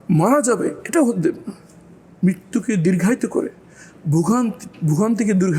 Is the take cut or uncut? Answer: uncut